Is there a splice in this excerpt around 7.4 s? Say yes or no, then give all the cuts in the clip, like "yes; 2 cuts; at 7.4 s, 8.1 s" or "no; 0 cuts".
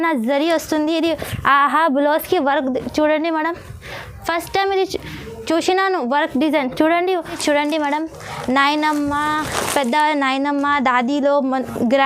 yes; 1 cut; at 7.4 s